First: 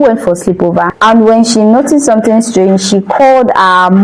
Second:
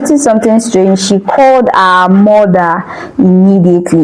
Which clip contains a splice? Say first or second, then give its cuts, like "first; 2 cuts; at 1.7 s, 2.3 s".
first; 1 cut; at 0.9 s